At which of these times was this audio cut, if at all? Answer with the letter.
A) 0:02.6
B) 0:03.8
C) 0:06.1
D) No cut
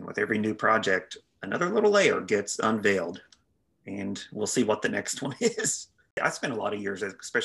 C